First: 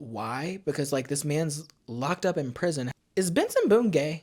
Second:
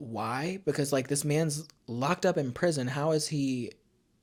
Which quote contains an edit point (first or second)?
first